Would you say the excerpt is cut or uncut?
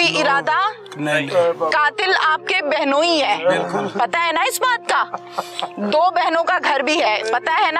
uncut